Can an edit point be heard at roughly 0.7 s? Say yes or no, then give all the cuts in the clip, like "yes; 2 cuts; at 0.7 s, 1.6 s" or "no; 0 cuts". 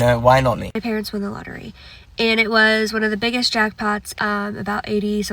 yes; 2 cuts; at 0.7 s, 4.1 s